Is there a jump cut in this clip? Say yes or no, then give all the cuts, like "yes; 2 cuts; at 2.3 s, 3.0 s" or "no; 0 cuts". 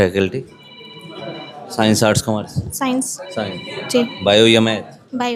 no; 0 cuts